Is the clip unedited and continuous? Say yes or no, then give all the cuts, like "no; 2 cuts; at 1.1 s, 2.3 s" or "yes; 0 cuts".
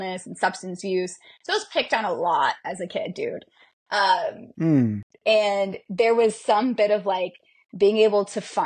yes; 0 cuts